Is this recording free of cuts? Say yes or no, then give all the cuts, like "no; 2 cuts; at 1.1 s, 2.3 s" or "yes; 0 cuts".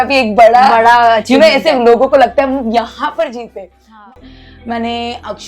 no; 1 cut; at 3.9 s